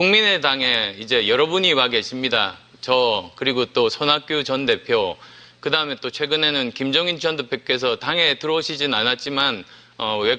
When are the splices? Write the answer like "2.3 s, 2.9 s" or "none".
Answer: 5.5 s